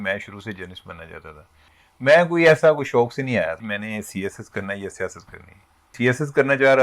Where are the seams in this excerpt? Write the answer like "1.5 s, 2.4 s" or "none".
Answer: 1.7 s, 3.7 s, 5.9 s

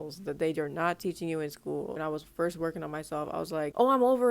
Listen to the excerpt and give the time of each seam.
2.0 s

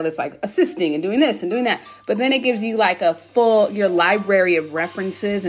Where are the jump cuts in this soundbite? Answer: none

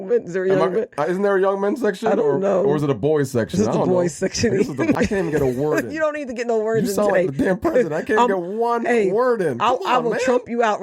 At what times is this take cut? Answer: 5.0 s

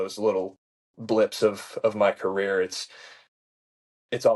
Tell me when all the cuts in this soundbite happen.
none

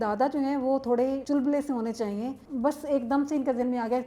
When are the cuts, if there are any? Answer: 1.2 s, 2.4 s

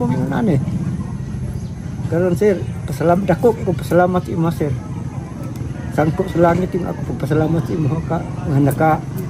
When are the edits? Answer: none

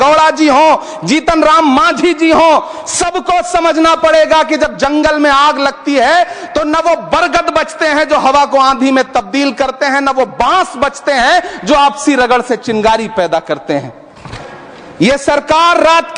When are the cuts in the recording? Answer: 14.2 s

